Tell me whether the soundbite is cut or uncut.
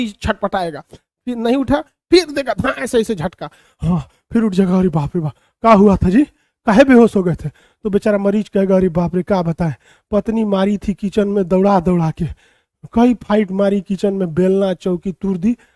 uncut